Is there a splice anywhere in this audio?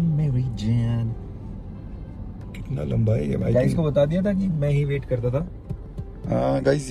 no; 0 cuts

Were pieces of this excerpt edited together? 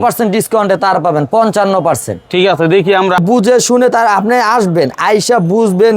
yes; 1 cut; at 3.2 s

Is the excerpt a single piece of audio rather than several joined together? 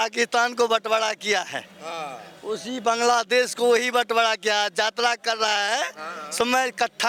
yes; 0 cuts

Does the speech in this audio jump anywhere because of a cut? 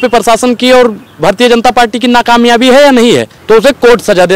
yes; 1 cut; at 3.3 s

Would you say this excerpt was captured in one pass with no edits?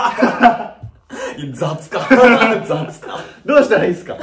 yes; 0 cuts

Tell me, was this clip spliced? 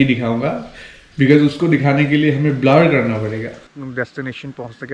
yes; 1 cut; at 3.7 s

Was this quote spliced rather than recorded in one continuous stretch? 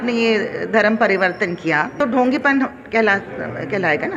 yes; 1 cut; at 2.0 s

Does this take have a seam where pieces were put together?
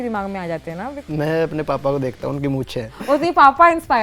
yes; 2 cuts; at 1.0 s, 2.9 s

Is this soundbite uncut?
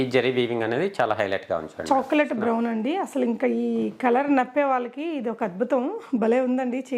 yes; 0 cuts

